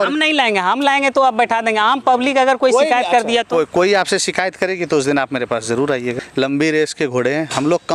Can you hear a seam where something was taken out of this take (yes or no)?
yes